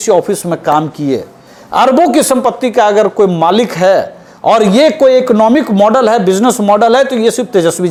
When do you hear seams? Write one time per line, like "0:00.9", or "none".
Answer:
none